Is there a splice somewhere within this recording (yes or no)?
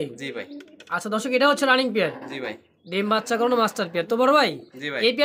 no